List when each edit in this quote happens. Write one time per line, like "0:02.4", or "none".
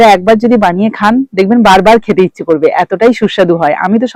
none